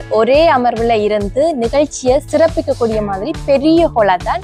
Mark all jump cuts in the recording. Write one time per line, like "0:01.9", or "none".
none